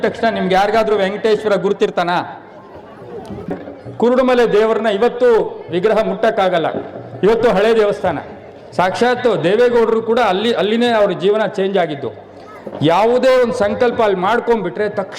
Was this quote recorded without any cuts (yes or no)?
no